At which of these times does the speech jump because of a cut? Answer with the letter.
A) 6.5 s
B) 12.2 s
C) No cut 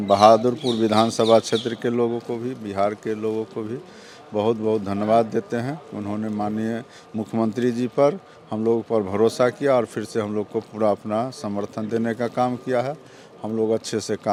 C